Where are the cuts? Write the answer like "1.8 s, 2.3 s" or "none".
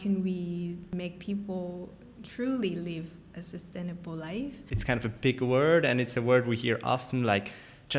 0.9 s, 4.7 s

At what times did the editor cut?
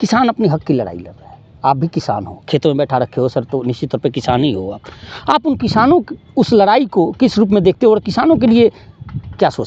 none

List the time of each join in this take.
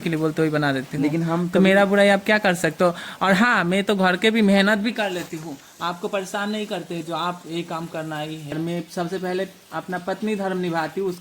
8.5 s

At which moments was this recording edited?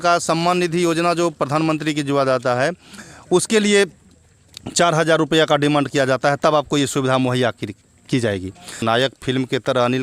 8.8 s

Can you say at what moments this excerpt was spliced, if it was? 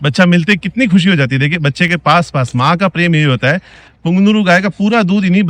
none

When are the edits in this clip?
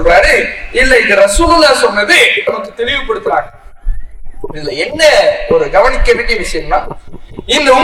none

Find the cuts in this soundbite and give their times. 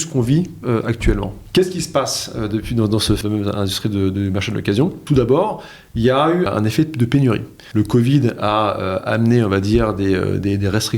1.4 s, 3.2 s, 5.0 s, 6.5 s, 7.6 s

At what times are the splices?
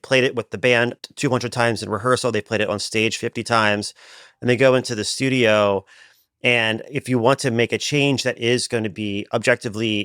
1.0 s

